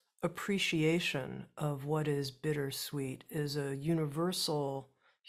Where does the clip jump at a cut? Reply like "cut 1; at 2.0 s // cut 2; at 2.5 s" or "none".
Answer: none